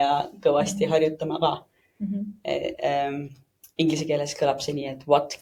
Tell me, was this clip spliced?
no; 0 cuts

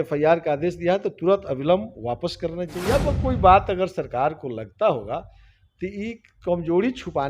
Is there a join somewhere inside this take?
yes; 1 cut; at 2.8 s

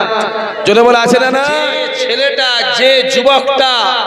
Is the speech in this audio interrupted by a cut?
yes; 1 cut; at 1.8 s

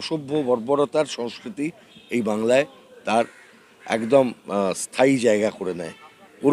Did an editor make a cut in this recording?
no; 0 cuts

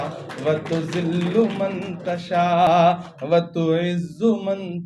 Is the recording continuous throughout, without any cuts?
yes; 0 cuts

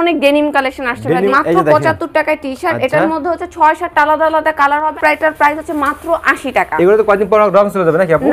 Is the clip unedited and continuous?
no; 2 cuts; at 1.3 s, 5.0 s

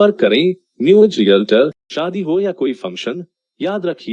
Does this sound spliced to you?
yes; 1 cut; at 1.9 s

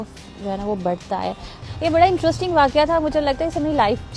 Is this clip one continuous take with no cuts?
no; 1 cut; at 1.6 s

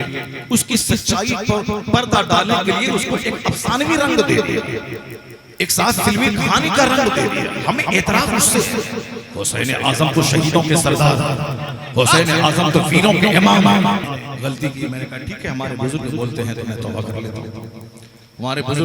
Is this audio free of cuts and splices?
no; 1 cut; at 14.1 s

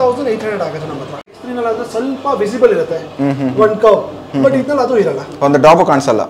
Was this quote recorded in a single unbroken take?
no; 1 cut; at 1.2 s

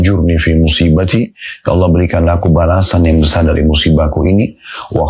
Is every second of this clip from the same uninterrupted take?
yes; 0 cuts

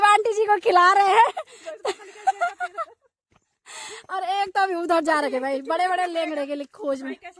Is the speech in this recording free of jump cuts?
yes; 0 cuts

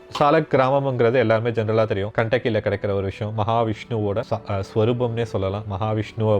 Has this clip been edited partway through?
yes; 2 cuts; at 2.1 s, 4.3 s

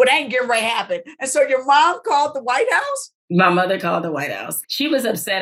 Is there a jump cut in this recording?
yes; 1 cut; at 4.5 s

